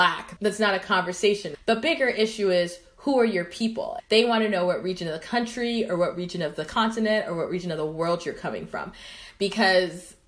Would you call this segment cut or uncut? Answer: cut